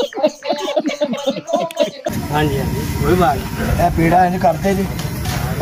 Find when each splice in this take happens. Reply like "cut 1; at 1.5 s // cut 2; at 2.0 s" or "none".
none